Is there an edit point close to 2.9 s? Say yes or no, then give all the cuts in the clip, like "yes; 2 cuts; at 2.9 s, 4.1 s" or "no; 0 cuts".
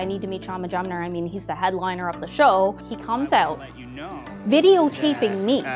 yes; 1 cut; at 2.9 s